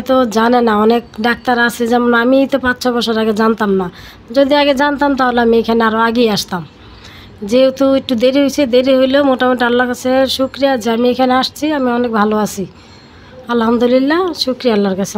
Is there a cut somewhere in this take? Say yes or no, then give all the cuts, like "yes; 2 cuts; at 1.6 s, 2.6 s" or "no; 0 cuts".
no; 0 cuts